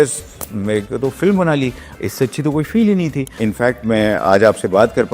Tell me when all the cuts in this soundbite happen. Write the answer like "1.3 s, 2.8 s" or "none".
3.3 s